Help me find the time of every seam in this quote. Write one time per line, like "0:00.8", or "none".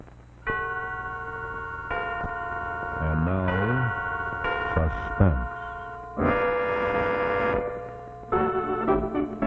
0:01.0